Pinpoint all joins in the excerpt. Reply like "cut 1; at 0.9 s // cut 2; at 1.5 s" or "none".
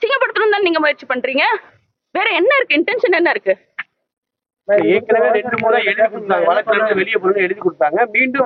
none

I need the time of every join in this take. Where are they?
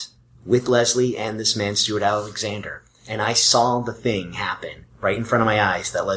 none

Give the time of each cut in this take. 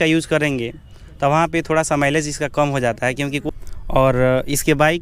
cut 1; at 3.4 s

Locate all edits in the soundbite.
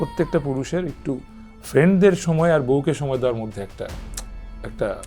none

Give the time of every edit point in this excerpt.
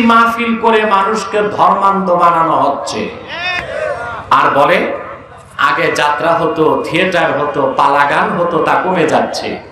cut 1; at 4.3 s

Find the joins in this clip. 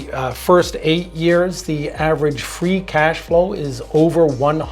none

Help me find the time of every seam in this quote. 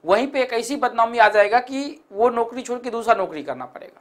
none

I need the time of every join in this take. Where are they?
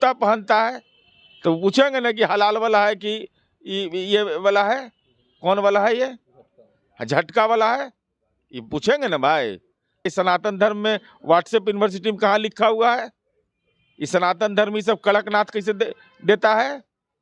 cut 1; at 10.1 s

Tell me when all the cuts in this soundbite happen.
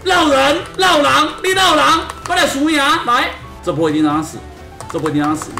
cut 1; at 3.4 s

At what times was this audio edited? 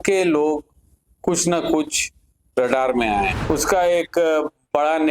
cut 1; at 3.3 s

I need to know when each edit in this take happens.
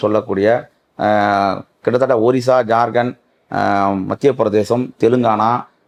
none

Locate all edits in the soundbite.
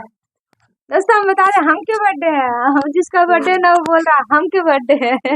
none

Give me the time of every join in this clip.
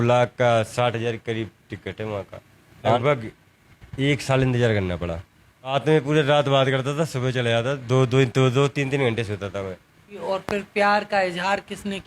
cut 1; at 3.0 s // cut 2; at 5.7 s // cut 3; at 10.2 s

